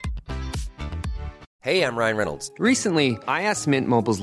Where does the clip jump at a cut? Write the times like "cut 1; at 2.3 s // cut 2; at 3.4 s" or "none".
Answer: cut 1; at 1.5 s